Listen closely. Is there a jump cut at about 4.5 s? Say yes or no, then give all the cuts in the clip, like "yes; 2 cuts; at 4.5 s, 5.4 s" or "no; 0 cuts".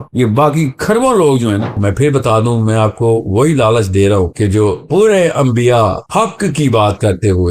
no; 1 cut; at 1.7 s